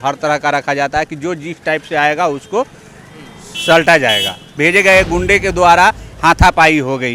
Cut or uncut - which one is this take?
cut